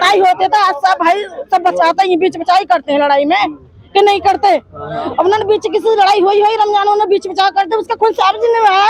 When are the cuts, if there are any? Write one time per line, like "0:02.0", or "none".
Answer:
none